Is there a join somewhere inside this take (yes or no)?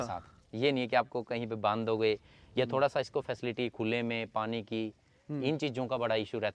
no